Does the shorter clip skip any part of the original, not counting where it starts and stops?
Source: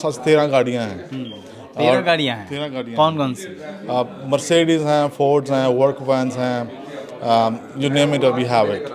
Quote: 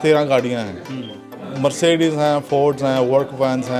yes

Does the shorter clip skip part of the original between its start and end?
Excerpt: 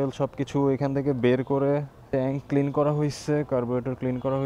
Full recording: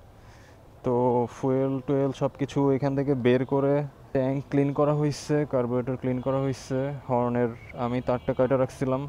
no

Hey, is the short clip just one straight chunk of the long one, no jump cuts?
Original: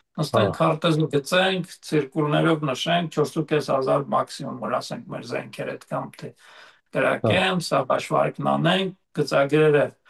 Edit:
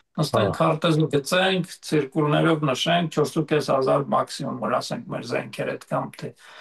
yes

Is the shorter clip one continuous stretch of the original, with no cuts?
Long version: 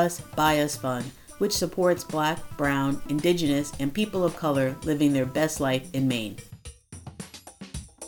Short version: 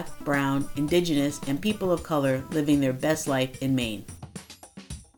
no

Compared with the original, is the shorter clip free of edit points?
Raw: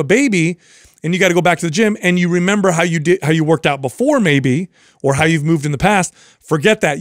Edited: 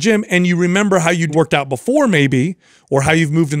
no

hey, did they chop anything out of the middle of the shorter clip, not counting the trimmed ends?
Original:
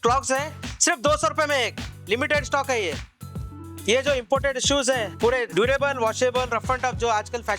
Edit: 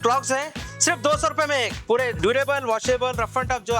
yes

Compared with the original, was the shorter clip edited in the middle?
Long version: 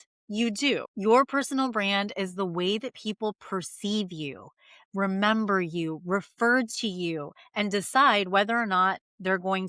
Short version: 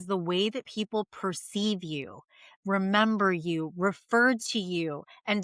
no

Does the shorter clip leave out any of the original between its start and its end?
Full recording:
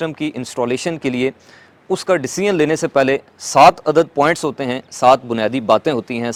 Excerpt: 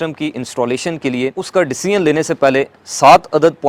yes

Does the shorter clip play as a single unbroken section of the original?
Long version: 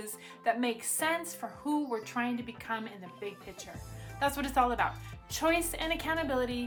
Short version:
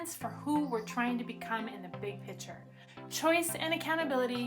no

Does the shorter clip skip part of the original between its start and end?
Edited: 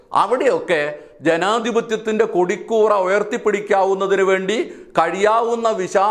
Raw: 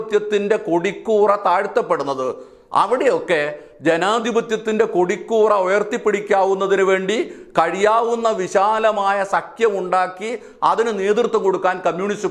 no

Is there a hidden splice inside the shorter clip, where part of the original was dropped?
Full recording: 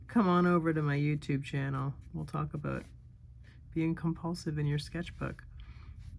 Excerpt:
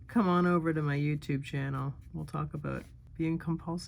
yes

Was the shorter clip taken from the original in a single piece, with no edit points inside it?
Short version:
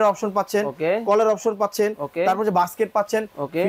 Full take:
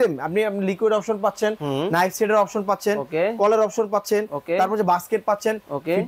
yes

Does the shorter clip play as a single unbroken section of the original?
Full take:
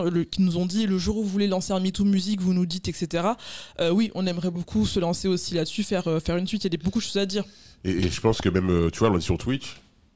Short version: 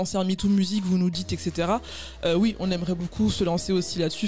yes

